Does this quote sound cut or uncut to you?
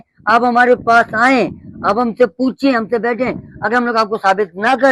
uncut